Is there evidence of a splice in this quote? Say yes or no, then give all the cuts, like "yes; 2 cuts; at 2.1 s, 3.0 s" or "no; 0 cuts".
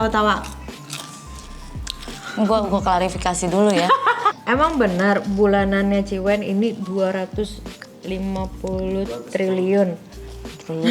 yes; 1 cut; at 4.3 s